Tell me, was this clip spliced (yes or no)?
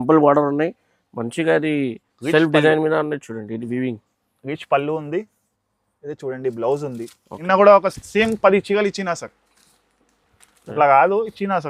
yes